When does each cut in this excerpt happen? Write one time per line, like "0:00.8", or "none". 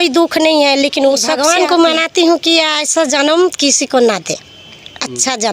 0:01.4